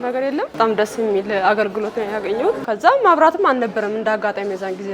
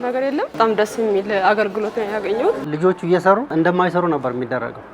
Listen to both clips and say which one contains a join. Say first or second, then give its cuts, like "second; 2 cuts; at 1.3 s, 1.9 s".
second; 2 cuts; at 2.6 s, 3.5 s